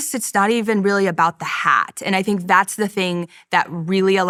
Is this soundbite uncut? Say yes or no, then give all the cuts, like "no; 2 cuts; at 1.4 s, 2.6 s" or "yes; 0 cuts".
yes; 0 cuts